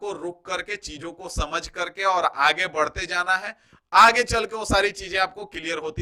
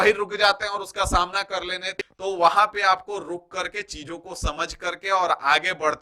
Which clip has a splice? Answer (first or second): second